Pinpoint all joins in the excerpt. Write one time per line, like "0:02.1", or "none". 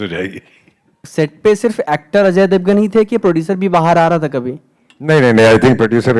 0:01.0